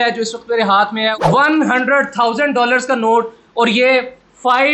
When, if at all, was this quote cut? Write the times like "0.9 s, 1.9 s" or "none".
none